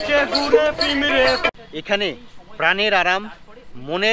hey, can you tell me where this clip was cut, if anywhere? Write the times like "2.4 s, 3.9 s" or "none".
1.4 s

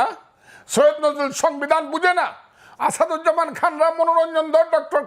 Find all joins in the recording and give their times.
none

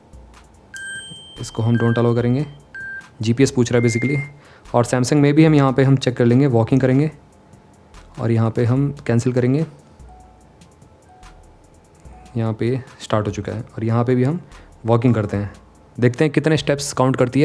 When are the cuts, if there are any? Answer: none

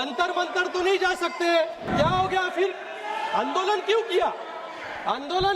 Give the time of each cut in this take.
1.9 s

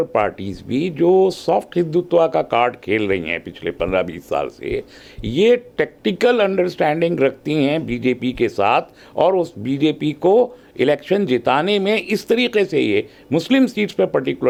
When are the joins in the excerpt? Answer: none

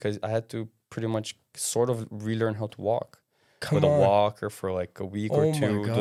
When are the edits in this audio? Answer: none

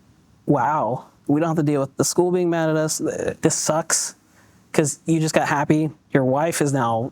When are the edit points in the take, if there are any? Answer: 1.1 s, 3.3 s, 6.0 s

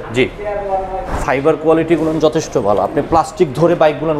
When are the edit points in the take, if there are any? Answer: 1.1 s

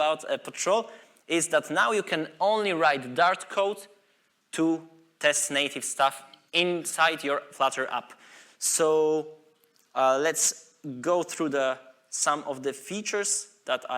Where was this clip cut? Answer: none

